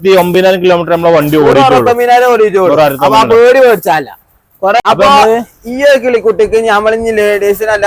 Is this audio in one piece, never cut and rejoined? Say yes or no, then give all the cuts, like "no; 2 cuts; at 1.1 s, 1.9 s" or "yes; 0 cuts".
no; 1 cut; at 4.8 s